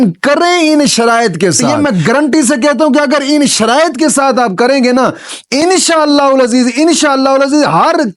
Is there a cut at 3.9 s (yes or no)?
no